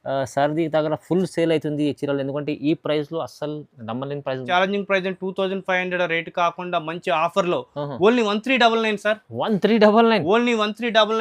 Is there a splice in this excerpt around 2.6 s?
no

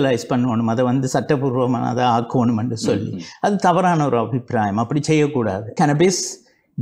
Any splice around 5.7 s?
yes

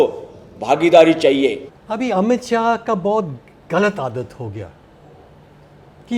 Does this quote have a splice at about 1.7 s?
yes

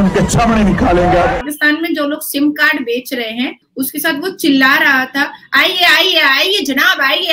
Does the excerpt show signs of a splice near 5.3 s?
no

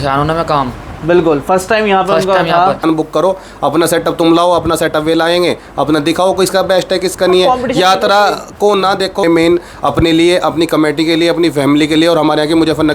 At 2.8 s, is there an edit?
yes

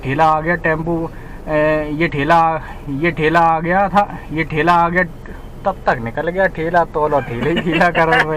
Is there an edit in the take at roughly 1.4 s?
no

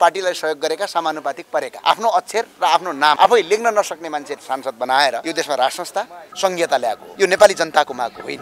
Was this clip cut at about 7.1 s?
yes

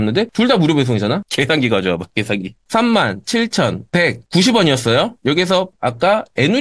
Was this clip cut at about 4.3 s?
no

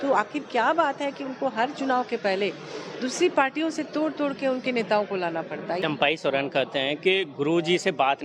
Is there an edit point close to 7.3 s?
no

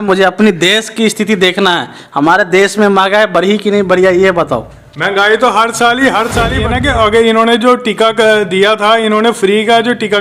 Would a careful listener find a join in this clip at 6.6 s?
yes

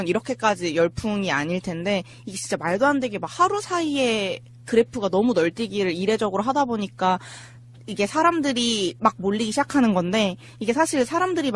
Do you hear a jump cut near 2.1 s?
yes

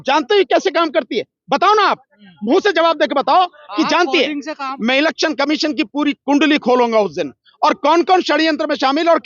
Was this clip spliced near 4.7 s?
yes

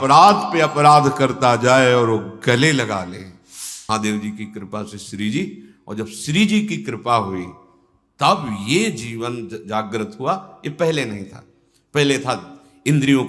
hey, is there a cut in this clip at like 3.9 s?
yes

